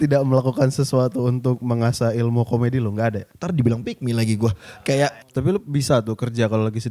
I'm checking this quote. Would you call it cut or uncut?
cut